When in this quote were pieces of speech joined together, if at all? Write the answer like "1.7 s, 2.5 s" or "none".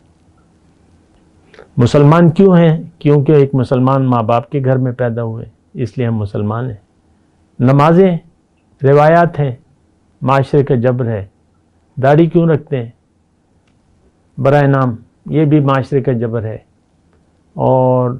none